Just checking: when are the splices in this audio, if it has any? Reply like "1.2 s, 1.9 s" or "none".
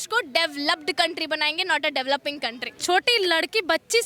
2.7 s